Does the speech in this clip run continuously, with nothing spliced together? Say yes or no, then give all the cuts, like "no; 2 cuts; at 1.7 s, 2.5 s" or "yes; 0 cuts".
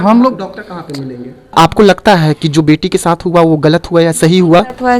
no; 1 cut; at 1.6 s